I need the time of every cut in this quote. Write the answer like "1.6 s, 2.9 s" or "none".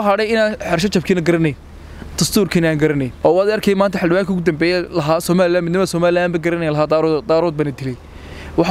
3.1 s